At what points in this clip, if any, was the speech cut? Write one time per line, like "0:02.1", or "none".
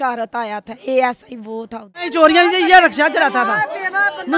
0:02.0